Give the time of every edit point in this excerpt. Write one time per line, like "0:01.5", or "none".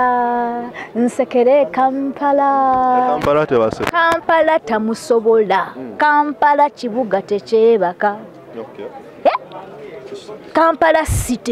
none